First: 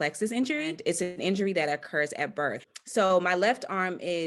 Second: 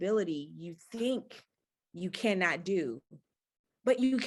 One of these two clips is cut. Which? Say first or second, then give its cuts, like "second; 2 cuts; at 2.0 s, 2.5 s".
first; 2 cuts; at 0.8 s, 2.7 s